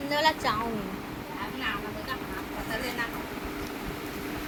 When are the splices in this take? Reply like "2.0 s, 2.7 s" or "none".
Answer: none